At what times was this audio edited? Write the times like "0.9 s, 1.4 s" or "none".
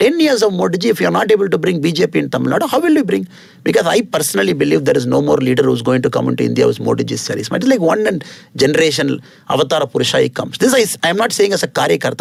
none